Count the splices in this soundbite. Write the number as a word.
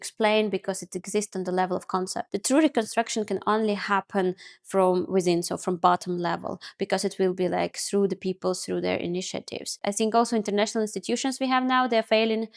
two